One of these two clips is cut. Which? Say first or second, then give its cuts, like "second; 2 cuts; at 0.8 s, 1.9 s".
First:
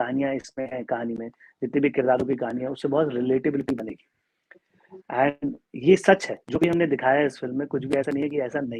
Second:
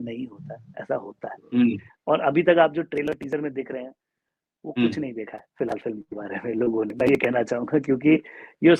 second; 1 cut; at 1.9 s